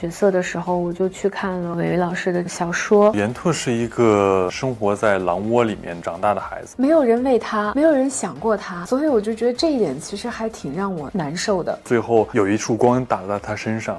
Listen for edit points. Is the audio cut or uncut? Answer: cut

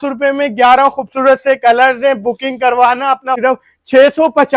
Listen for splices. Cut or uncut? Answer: cut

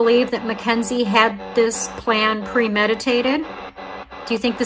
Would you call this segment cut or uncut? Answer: uncut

